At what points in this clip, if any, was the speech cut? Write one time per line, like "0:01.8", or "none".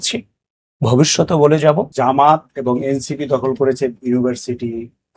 0:01.9